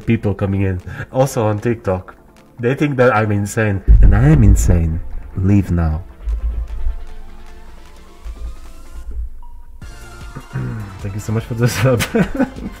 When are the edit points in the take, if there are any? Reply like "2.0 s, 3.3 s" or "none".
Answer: none